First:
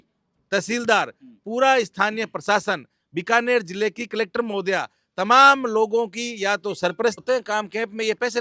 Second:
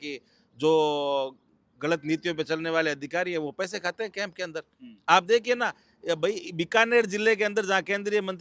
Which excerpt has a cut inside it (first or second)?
first